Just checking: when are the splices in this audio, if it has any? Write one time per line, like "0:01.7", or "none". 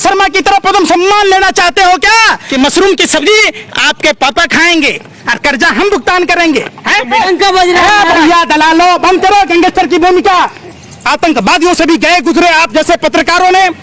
0:02.4
0:07.1
0:10.6